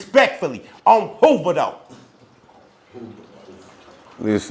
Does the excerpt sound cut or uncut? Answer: uncut